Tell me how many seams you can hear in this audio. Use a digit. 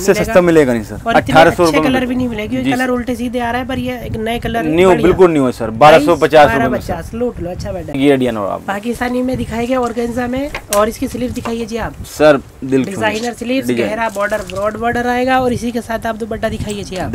0